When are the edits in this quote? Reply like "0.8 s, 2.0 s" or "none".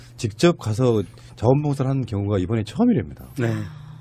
3.1 s